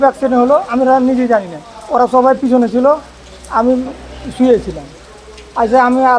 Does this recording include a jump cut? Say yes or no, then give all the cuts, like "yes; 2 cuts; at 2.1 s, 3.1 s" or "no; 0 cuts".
no; 0 cuts